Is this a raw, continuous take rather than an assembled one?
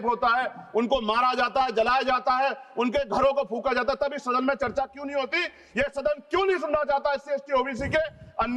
yes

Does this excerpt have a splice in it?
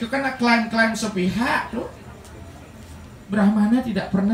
yes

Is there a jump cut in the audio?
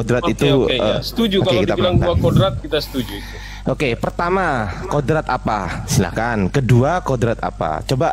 no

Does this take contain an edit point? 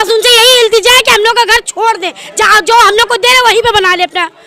no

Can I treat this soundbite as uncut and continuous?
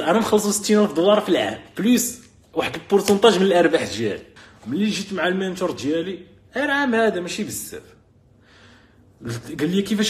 no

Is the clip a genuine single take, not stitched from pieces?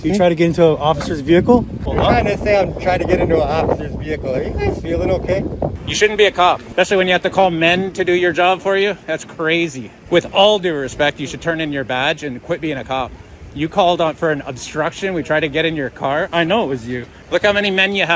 no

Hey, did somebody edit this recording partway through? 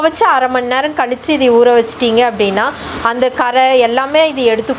no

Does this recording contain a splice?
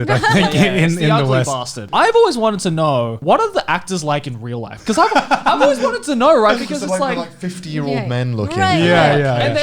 yes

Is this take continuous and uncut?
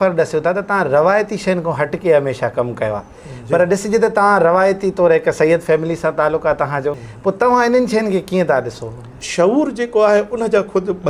no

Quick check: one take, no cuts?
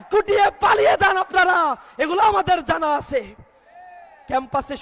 yes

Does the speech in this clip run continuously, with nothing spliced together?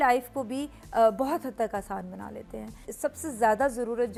yes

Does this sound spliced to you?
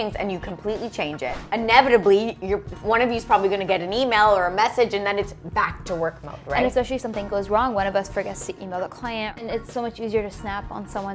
yes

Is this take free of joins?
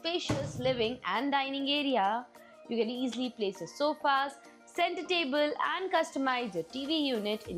yes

